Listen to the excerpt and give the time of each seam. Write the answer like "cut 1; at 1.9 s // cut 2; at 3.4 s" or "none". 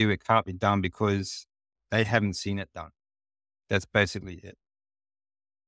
none